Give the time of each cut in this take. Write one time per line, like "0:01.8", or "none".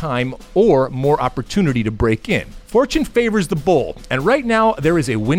0:02.5